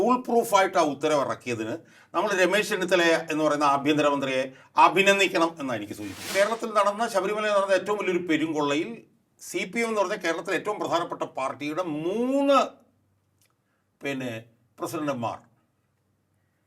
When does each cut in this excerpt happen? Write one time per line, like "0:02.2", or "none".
0:06.2